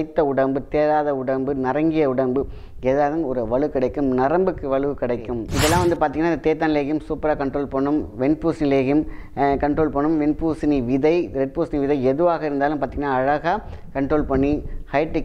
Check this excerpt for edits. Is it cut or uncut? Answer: cut